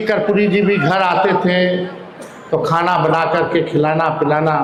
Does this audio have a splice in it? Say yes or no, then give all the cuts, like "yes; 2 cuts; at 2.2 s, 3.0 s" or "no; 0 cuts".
no; 0 cuts